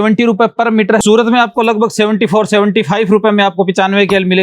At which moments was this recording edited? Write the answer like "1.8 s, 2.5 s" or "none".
1.0 s